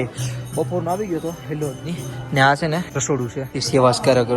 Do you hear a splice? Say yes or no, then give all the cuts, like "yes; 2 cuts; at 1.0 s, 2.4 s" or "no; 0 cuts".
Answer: yes; 1 cut; at 3.4 s